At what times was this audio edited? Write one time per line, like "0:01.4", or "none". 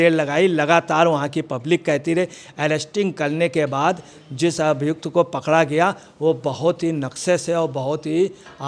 none